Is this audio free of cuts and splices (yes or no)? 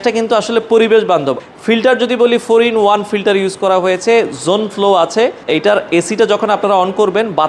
no